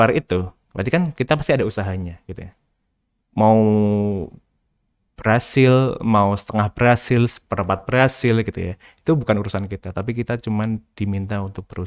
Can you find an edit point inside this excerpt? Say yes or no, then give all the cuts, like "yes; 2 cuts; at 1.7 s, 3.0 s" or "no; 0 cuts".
no; 0 cuts